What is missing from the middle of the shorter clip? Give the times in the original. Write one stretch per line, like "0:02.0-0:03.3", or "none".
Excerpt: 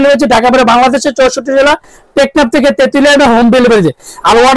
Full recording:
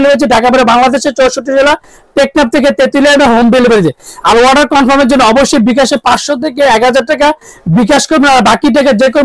none